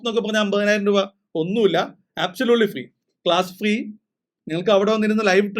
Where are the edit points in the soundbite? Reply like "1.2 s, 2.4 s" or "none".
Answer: none